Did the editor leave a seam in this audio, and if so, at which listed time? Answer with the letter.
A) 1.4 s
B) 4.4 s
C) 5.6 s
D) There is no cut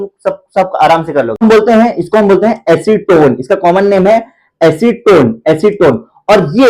A